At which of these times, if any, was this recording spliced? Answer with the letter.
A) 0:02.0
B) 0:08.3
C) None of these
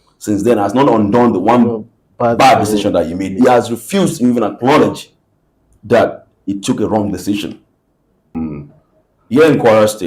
B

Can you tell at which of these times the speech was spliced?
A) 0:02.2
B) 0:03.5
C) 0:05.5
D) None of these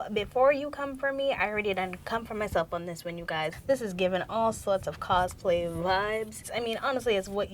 B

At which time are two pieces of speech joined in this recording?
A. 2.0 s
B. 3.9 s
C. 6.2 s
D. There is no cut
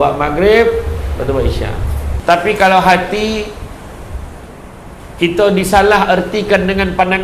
A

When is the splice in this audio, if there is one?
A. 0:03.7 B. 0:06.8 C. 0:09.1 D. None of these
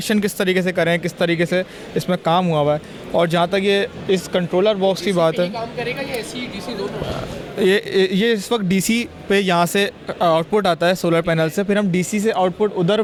D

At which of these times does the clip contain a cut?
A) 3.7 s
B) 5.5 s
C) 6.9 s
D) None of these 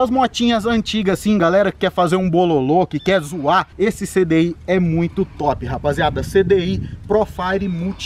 A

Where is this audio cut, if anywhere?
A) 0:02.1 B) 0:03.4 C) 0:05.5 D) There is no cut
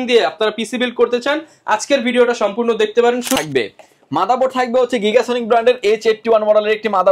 B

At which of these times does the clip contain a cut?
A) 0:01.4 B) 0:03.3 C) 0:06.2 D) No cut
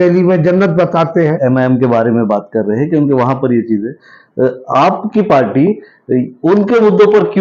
A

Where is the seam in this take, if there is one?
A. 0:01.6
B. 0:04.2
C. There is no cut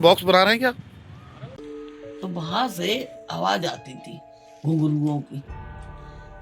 A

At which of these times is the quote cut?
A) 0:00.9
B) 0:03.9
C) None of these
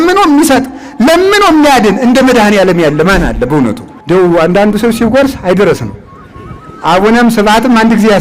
B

